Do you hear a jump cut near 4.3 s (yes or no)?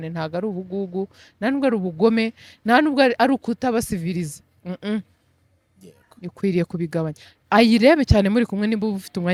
no